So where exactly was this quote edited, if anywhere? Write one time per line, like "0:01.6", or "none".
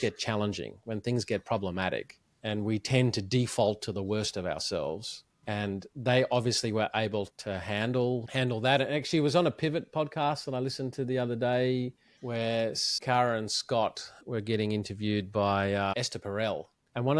none